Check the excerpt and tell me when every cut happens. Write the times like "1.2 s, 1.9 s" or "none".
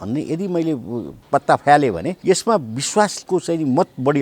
1.2 s, 2.1 s, 3.2 s